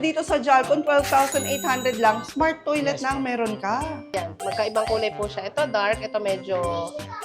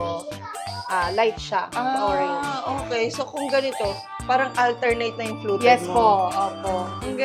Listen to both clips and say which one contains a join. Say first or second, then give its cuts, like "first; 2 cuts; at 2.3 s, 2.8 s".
first; 1 cut; at 4.0 s